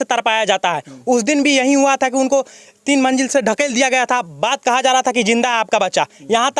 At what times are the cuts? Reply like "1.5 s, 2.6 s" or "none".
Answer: none